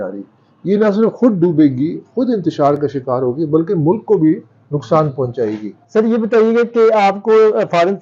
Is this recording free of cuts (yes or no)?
yes